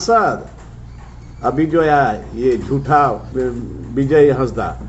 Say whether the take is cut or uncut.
cut